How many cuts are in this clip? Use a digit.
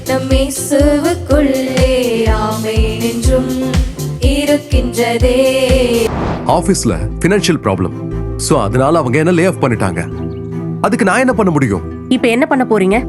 1